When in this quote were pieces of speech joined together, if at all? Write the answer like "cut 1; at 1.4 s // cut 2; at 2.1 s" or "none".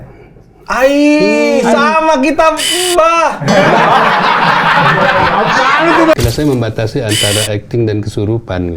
cut 1; at 6.1 s